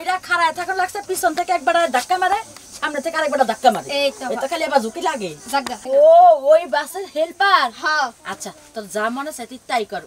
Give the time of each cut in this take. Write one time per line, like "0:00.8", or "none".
0:05.8